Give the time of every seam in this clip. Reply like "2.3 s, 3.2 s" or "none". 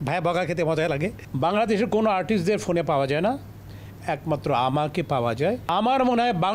1.2 s, 5.6 s